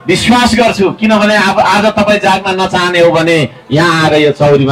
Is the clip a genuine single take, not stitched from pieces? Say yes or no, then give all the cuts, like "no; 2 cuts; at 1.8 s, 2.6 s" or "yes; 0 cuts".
yes; 0 cuts